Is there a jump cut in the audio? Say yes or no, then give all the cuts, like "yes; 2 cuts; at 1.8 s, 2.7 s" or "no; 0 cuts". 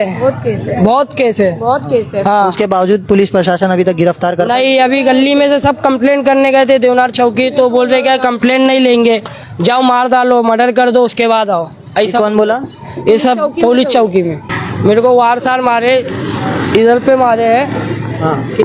yes; 1 cut; at 14.6 s